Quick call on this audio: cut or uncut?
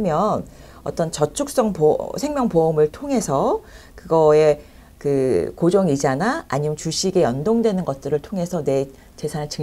uncut